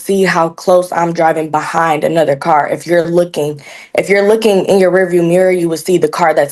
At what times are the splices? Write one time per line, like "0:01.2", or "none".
none